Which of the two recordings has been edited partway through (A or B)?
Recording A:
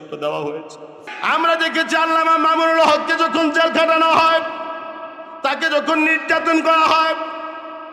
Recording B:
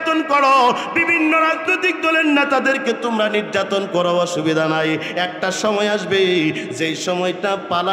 A